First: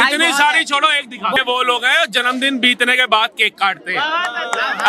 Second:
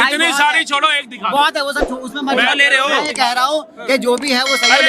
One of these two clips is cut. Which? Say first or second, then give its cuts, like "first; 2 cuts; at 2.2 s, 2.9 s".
first; 1 cut; at 1.4 s